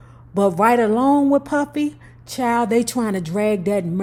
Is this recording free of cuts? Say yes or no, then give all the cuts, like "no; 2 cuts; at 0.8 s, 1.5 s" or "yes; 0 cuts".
yes; 0 cuts